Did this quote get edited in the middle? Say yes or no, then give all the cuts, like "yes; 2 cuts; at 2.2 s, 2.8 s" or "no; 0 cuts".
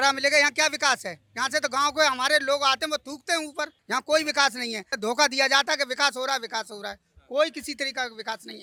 no; 0 cuts